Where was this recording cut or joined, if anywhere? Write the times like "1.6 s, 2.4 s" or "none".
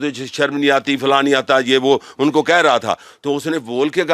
none